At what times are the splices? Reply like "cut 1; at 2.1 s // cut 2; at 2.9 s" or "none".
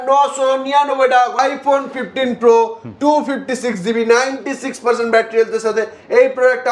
cut 1; at 1.4 s